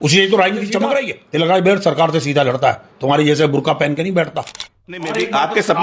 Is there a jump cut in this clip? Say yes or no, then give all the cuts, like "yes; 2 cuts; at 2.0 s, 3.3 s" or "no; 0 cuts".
yes; 2 cuts; at 1.2 s, 5.0 s